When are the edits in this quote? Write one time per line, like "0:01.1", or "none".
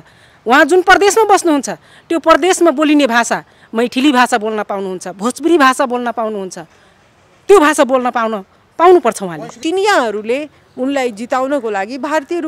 0:09.6